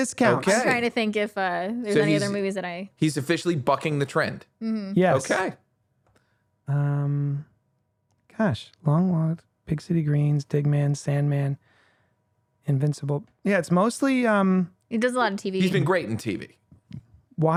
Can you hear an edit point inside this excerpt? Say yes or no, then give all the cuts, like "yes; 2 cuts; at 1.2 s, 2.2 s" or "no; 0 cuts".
no; 0 cuts